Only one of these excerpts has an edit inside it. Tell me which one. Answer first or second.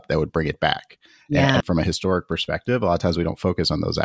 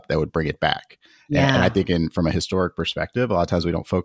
first